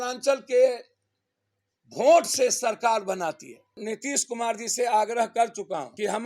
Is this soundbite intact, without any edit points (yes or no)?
no